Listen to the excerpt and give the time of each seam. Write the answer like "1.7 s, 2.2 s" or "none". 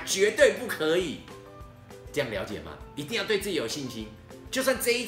none